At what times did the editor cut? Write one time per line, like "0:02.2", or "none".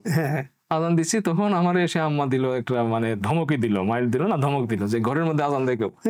none

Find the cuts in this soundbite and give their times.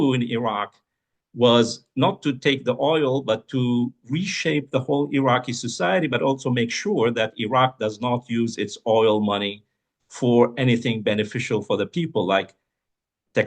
none

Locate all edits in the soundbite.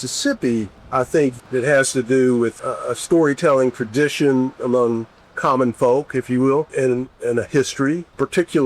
0:01.4

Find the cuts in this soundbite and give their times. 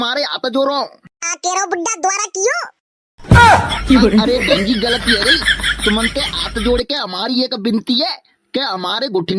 0:03.1
0:04.2

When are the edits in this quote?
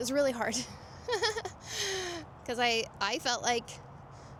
none

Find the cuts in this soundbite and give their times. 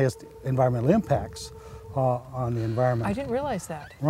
none

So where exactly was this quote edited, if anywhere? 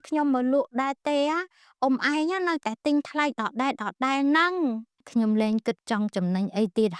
0:05.1

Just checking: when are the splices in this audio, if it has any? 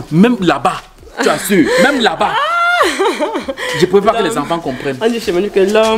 none

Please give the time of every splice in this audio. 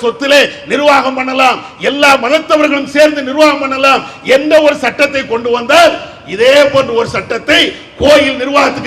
none

